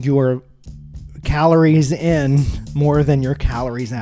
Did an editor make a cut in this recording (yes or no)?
no